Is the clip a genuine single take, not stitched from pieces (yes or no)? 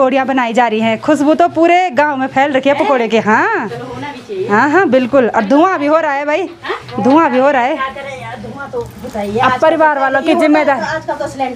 yes